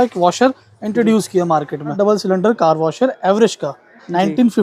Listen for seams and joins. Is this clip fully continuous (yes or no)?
no